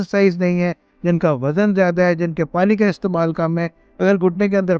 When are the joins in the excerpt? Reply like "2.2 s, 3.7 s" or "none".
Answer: 3.8 s